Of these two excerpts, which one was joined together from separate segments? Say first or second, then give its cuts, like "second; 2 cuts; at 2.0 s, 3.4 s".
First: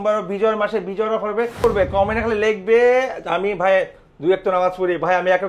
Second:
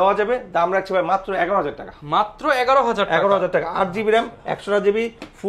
first; 1 cut; at 1.6 s